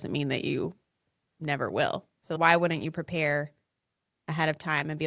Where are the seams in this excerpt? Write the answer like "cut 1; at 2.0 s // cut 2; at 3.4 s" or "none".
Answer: cut 1; at 2.3 s